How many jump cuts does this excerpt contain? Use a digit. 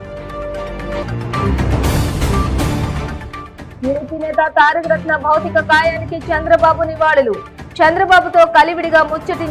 1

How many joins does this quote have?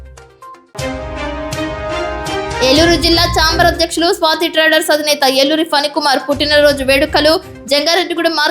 1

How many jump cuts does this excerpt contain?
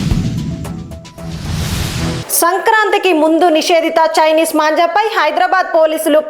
1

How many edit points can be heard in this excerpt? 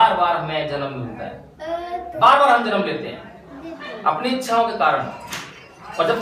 0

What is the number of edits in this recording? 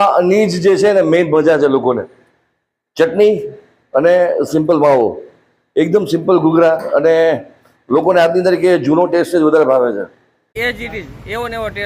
1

